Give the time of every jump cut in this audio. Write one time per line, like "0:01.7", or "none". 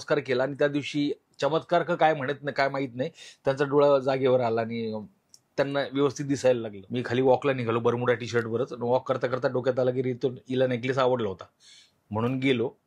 0:06.8